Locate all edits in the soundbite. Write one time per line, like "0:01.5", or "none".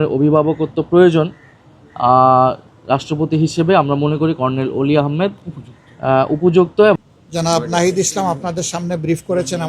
0:07.0